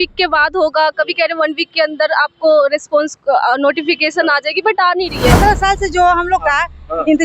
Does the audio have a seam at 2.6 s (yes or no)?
no